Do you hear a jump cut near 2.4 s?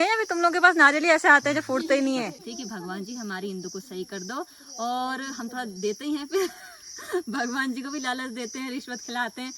yes; 1 cut; at 2.4 s

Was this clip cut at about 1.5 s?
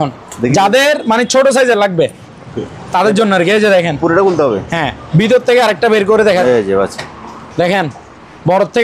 no; 1 cut; at 6.4 s

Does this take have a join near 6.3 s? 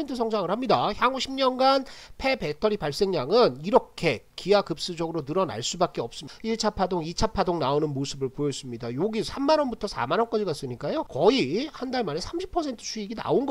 yes; 2 cuts; at 6.3 s, 11.1 s

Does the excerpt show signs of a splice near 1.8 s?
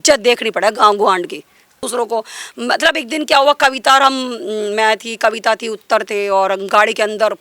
yes; 1 cut; at 1.8 s

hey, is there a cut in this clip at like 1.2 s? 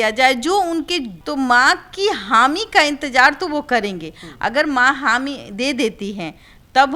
yes; 1 cut; at 1.2 s

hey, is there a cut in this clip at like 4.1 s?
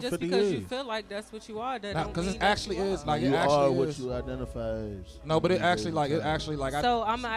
no; 0 cuts

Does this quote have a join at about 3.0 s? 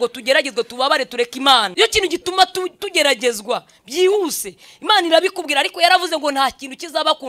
no; 1 cut; at 1.7 s

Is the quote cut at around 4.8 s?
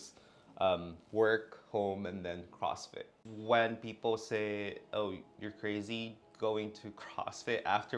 no; 1 cut; at 3.1 s

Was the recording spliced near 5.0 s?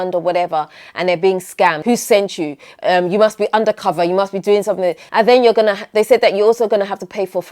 yes; 2 cuts; at 1.8 s, 5.0 s

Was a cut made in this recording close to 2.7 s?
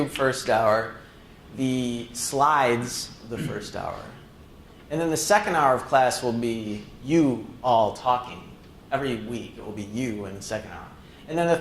no; 1 cut; at 5.5 s

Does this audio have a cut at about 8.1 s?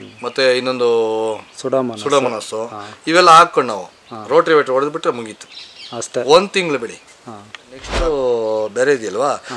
yes; 1 cut; at 8.1 s

